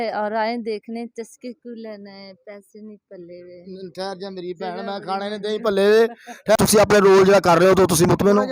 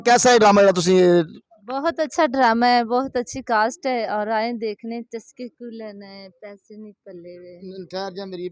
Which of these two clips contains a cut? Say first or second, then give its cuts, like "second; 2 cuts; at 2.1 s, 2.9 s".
first; 1 cut; at 6.6 s